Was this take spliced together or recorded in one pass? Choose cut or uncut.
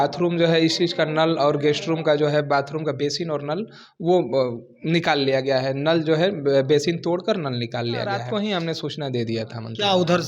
cut